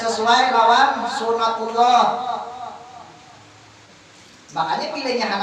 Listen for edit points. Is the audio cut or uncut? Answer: cut